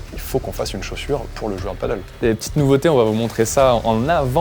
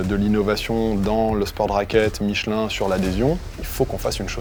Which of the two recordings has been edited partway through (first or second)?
first